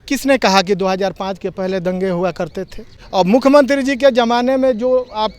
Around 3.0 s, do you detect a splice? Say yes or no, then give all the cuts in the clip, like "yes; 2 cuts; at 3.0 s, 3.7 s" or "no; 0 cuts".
yes; 1 cut; at 3.0 s